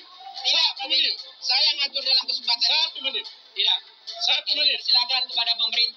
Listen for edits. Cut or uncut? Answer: uncut